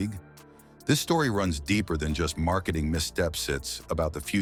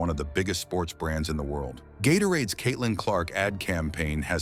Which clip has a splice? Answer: second; 1 cut; at 1.8 s

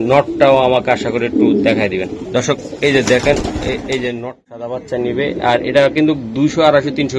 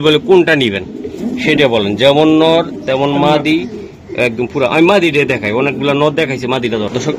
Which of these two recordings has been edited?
first; 1 cut; at 4.2 s

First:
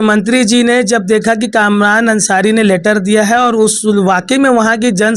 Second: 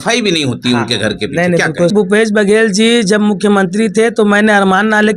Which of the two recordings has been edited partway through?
second; 1 cut; at 1.9 s

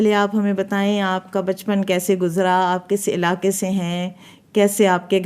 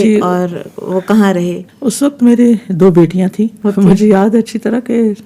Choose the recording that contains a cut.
second; 2 cuts; at 1.6 s, 3.5 s

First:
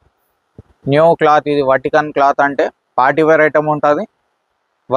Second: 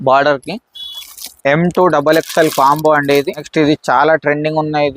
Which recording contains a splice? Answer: second; 1 cut; at 3.5 s

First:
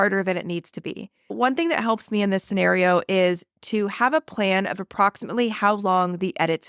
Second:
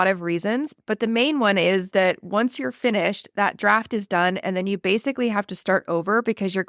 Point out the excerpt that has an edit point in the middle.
first; 1 cut; at 1.4 s

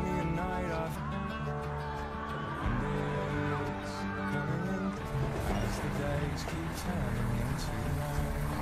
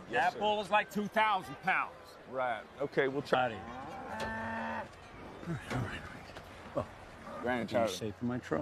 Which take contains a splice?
first; 1 cut; at 5.0 s

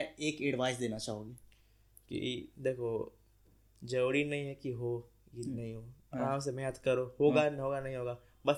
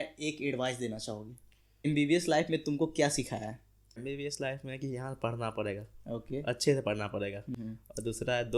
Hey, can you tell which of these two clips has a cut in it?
second; 3 cuts; at 1.9 s, 4.0 s, 7.6 s

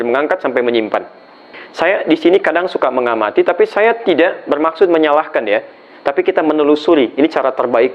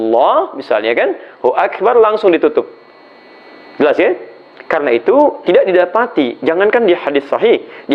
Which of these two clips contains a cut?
first; 1 cut; at 1.6 s

